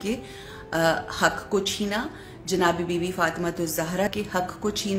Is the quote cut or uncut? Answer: cut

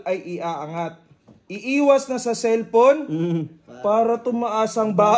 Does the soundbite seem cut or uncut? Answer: uncut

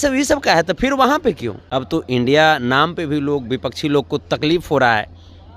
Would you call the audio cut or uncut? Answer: cut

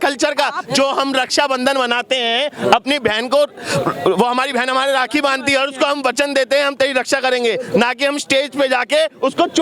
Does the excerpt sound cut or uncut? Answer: uncut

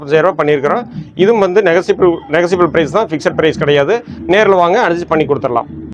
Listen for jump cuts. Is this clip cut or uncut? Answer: uncut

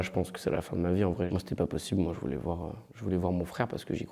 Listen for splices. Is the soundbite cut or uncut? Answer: cut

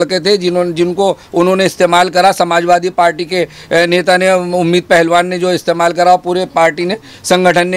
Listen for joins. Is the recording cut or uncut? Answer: uncut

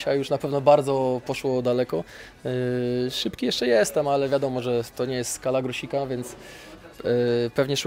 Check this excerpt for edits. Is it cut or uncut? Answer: uncut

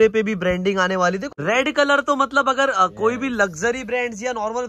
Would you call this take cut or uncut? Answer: cut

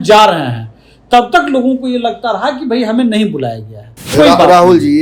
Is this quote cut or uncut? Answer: cut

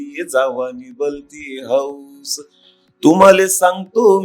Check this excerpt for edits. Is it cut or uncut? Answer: uncut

